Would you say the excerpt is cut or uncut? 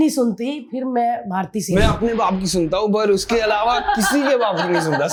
uncut